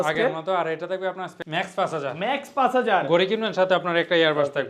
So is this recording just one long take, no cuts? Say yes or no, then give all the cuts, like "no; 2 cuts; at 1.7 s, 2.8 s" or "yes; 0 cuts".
no; 1 cut; at 1.3 s